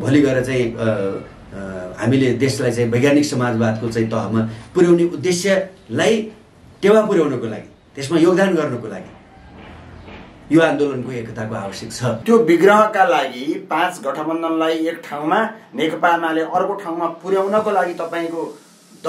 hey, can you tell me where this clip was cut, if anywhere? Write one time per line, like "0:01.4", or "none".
0:12.2